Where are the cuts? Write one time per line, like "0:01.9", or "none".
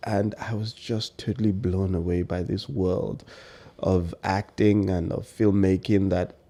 none